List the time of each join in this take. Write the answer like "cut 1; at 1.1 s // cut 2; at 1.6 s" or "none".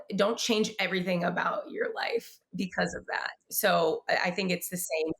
cut 1; at 3.4 s

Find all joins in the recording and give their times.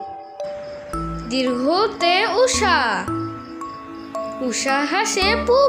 none

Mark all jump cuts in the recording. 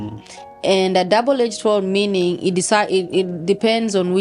none

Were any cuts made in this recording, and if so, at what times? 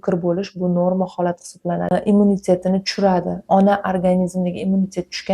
cut 1; at 1.9 s

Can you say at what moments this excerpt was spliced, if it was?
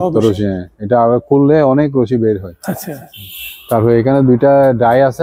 none

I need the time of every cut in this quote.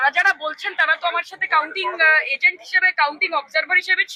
none

